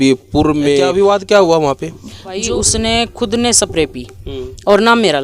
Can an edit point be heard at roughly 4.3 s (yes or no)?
no